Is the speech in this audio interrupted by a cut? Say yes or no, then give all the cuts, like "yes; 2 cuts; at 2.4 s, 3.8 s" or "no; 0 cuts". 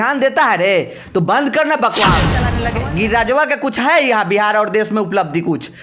yes; 1 cut; at 2.6 s